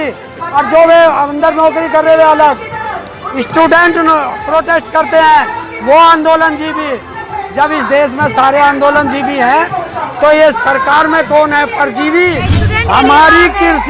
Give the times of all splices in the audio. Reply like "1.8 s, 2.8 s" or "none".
12.7 s